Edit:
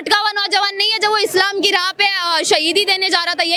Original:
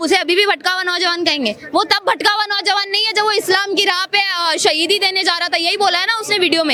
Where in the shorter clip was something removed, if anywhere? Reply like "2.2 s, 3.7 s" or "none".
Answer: none

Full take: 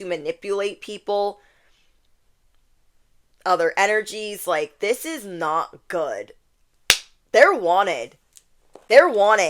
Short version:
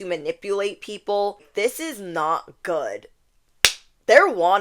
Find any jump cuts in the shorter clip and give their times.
1.5 s

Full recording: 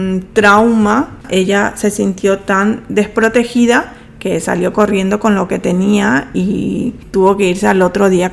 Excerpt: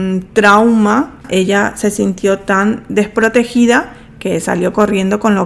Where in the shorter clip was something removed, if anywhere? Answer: none

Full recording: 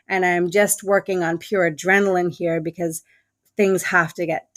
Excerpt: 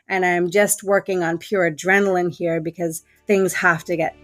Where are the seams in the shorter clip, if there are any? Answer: 3.1 s

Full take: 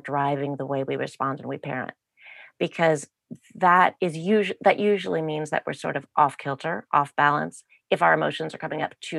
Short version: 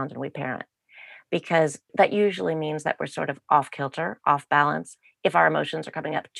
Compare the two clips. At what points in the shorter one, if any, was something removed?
1.9 s

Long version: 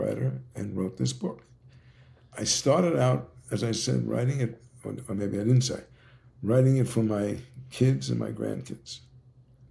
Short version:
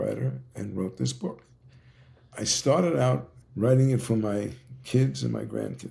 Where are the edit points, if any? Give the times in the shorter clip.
3.4 s

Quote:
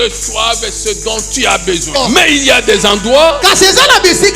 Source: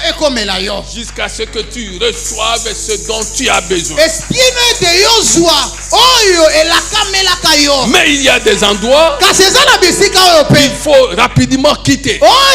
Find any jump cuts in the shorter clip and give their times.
2.0 s

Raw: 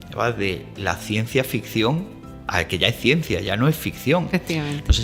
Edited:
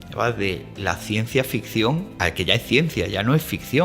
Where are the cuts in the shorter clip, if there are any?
2.1 s

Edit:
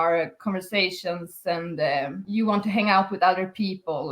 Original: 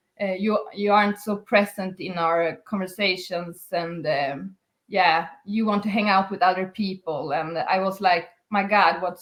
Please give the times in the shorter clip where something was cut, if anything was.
2.2 s

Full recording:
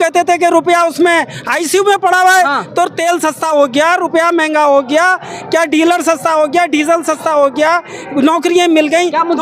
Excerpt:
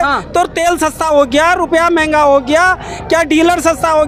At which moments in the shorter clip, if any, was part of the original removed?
none

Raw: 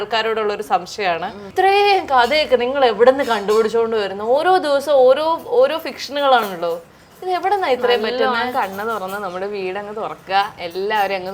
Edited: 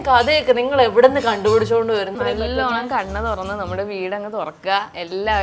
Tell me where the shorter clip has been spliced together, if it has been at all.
2.2 s

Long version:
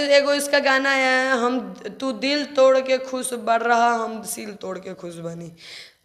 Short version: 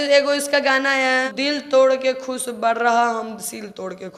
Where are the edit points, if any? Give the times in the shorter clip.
1.3 s

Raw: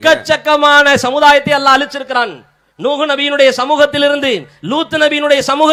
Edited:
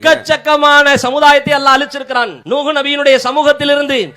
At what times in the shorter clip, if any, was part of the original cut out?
2.4 s

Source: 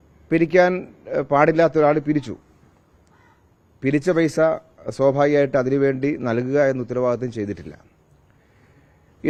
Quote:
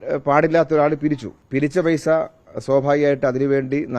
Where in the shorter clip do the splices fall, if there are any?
1.3 s

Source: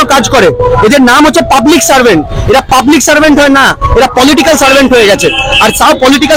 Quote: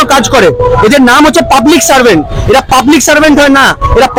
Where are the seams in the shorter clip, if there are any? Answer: none

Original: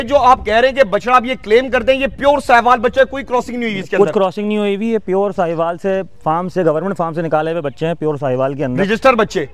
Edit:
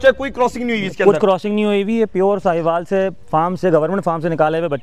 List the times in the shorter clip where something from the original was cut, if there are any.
none

